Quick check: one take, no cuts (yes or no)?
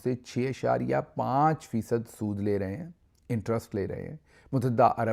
yes